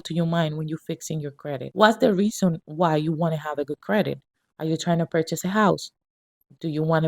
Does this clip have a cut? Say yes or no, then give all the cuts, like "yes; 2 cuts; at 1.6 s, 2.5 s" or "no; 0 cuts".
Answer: yes; 1 cut; at 1.7 s